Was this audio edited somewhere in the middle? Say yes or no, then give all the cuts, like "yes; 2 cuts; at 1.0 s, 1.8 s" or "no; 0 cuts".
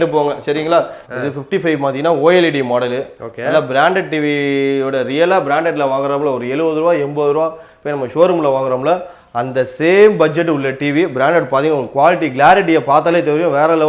yes; 1 cut; at 1.0 s